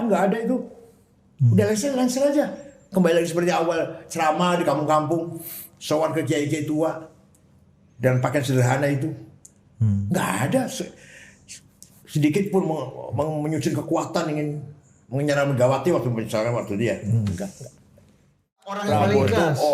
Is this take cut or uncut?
cut